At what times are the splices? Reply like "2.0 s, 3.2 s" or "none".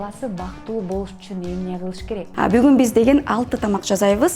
2.3 s